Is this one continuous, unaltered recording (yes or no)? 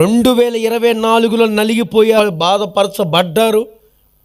no